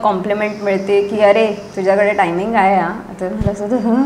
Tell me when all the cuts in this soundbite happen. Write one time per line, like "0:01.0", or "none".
none